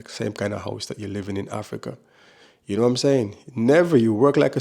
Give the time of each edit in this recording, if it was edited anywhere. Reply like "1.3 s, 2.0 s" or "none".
none